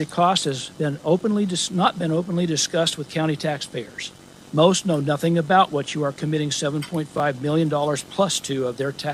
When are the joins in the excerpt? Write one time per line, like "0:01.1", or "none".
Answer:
none